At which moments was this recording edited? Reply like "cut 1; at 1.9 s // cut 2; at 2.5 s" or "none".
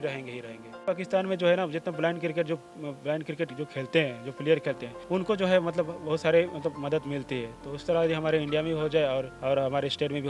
cut 1; at 0.8 s // cut 2; at 4.9 s // cut 3; at 9.3 s